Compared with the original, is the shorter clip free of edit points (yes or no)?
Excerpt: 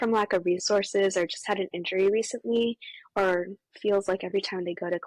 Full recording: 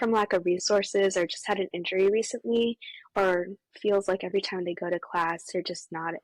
yes